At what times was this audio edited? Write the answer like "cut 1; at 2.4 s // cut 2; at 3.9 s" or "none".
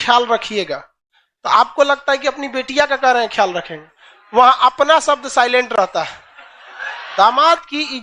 cut 1; at 7.0 s